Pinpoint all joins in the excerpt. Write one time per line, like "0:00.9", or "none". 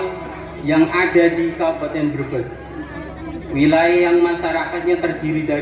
none